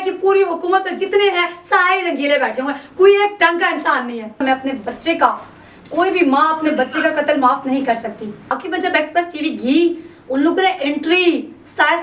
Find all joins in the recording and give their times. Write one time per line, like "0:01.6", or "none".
0:04.4
0:08.5